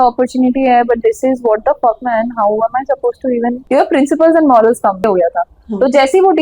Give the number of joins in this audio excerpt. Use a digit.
2